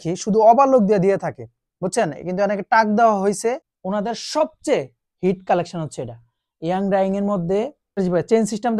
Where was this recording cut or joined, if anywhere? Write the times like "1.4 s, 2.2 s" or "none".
3.7 s, 8.0 s